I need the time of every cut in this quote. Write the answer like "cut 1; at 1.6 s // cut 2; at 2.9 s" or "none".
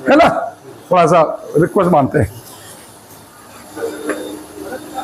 none